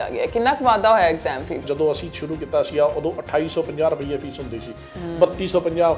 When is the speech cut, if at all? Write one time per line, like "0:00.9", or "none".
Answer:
0:01.6